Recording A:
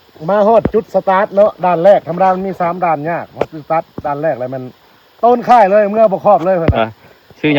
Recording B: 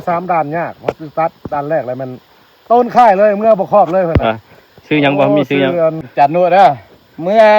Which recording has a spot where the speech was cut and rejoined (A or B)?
B